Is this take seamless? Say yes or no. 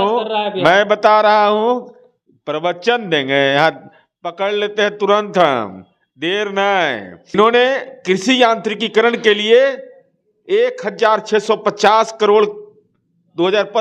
no